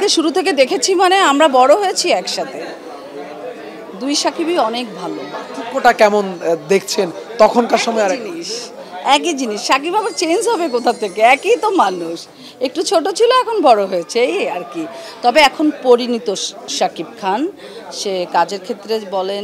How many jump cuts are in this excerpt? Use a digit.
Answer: 0